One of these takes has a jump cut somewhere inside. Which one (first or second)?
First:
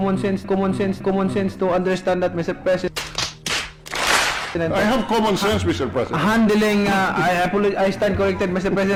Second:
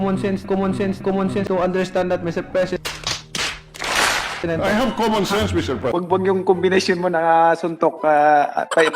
second